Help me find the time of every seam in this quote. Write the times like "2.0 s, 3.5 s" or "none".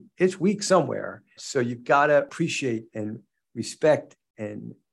1.4 s, 2.3 s